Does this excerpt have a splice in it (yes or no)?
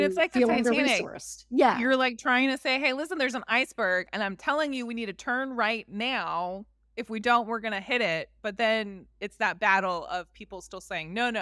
no